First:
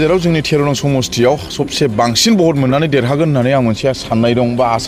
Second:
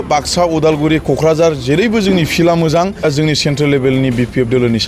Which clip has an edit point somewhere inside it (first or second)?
second